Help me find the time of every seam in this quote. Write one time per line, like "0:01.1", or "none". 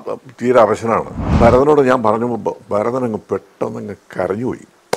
0:01.3